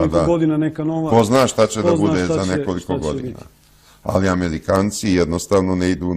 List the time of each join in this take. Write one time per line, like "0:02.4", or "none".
0:01.3

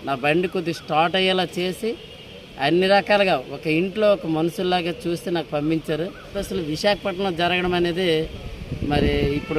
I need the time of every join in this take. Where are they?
0:06.4

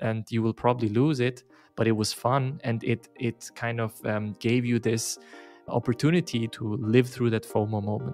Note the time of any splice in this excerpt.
0:05.6
0:06.5

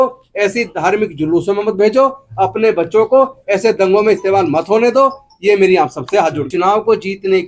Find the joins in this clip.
0:06.5

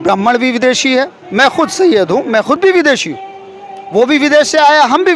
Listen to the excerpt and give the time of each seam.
none

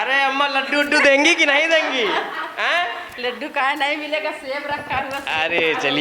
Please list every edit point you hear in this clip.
none

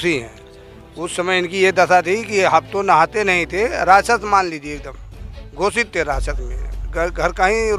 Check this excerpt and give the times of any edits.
none

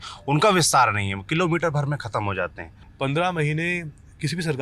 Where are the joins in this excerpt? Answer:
0:02.8

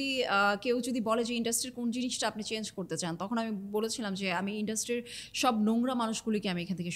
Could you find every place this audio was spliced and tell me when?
none

